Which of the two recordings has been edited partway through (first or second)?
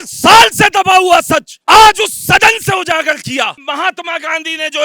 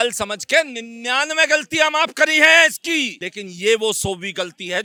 first